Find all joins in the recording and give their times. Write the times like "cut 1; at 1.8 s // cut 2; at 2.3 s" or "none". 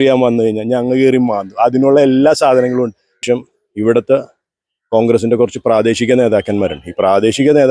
cut 1; at 3.2 s